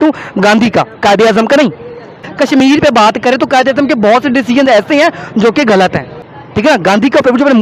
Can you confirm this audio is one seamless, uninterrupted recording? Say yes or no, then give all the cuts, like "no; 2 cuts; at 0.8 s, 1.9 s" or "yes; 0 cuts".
no; 2 cuts; at 2.3 s, 5.9 s